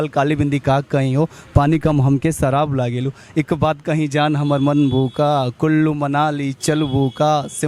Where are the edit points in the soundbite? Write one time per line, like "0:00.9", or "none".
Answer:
none